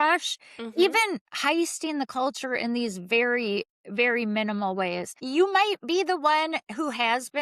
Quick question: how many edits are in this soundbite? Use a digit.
1